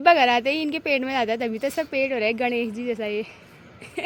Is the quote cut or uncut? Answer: uncut